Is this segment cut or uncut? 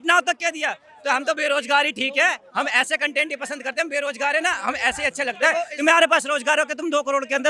uncut